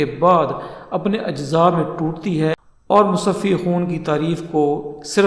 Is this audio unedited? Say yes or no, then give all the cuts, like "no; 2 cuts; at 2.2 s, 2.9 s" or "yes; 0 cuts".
no; 1 cut; at 2.6 s